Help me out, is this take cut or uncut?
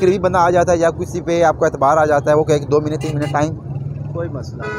uncut